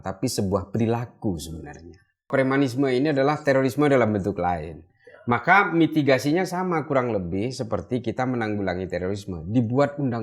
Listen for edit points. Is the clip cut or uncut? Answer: cut